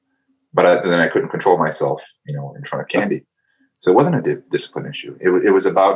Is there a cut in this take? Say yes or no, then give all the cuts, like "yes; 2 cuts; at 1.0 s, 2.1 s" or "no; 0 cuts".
no; 0 cuts